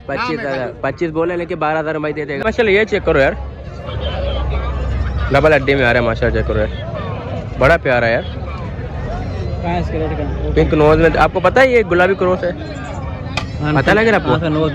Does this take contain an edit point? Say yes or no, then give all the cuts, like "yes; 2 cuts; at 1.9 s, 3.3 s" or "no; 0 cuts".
yes; 1 cut; at 2.4 s